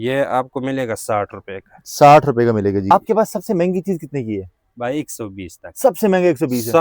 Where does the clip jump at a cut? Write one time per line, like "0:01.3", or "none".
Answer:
0:02.9